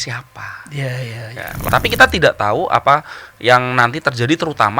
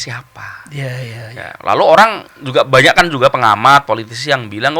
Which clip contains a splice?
first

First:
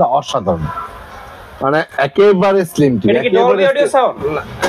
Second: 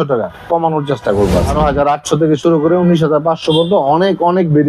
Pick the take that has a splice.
second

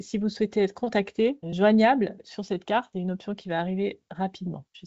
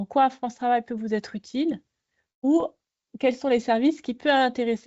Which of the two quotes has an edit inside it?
first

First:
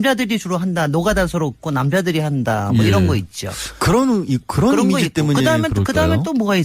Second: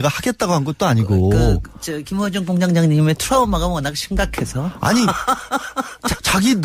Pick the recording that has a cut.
first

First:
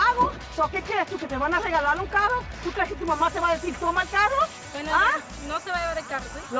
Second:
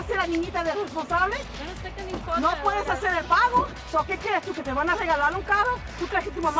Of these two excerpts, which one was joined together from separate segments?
first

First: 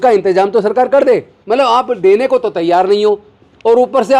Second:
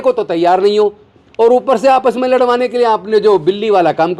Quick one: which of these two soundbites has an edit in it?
first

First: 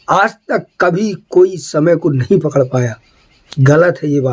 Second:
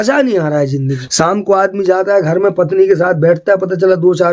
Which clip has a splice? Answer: second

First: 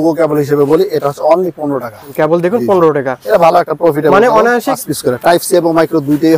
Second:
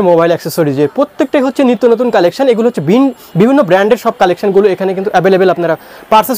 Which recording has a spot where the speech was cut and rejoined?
first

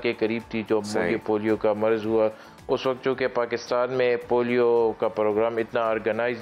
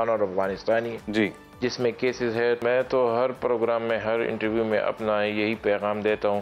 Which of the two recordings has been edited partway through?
second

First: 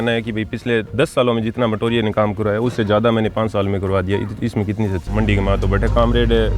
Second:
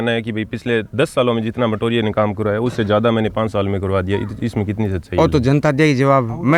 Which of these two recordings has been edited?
first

